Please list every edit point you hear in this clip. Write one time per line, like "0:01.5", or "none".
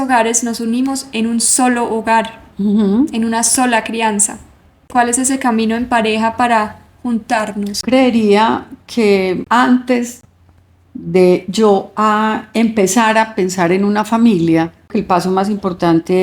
0:04.9
0:07.8
0:09.4
0:14.9